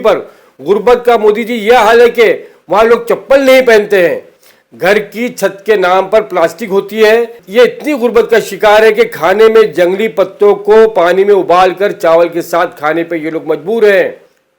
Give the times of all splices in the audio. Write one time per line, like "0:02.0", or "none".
0:07.4